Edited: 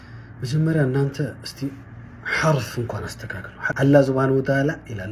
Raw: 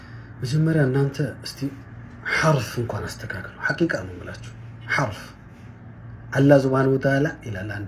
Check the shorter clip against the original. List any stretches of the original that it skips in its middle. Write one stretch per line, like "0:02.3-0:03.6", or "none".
0:03.6-0:06.1